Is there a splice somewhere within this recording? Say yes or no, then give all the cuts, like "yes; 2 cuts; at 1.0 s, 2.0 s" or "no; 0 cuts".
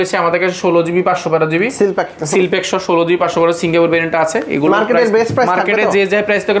no; 0 cuts